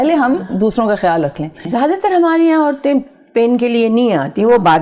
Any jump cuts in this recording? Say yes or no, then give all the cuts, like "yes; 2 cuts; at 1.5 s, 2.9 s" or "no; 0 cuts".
yes; 1 cut; at 1.7 s